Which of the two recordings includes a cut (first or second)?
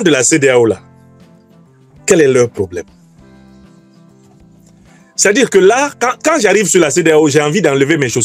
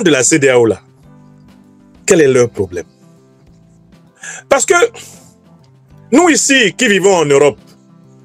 second